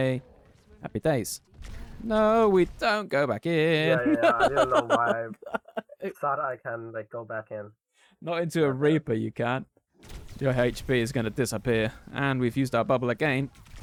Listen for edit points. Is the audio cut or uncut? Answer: uncut